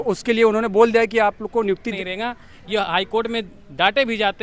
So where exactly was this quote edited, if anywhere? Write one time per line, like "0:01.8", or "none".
0:02.0